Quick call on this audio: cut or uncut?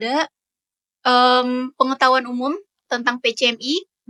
uncut